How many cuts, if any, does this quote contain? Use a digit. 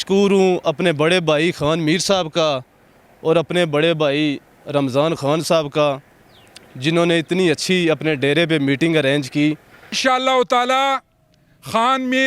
1